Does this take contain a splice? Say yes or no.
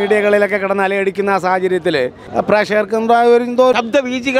yes